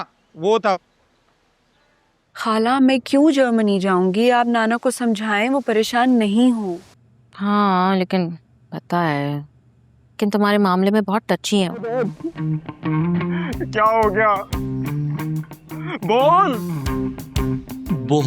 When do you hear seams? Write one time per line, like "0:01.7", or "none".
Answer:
0:02.4
0:11.9